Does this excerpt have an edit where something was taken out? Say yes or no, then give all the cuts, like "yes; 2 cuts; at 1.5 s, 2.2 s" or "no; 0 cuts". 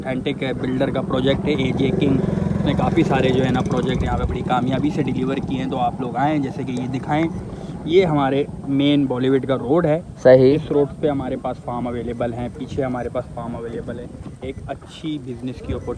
no; 0 cuts